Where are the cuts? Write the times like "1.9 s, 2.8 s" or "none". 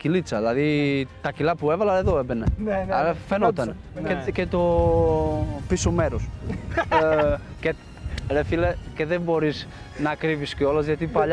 none